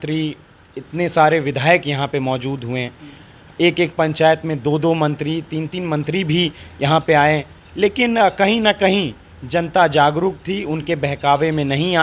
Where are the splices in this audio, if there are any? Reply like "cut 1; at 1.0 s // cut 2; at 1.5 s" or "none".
none

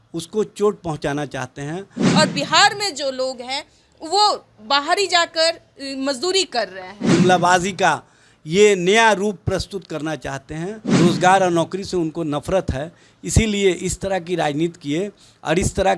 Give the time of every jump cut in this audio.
cut 1; at 2.0 s // cut 2; at 6.9 s // cut 3; at 10.8 s

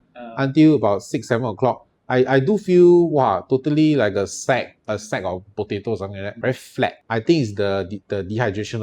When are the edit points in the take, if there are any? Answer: cut 1; at 7.0 s

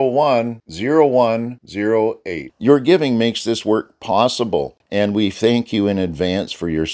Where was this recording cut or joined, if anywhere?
cut 1; at 4.8 s

